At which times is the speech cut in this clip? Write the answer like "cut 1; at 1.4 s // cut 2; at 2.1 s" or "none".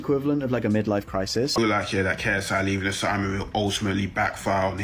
cut 1; at 1.5 s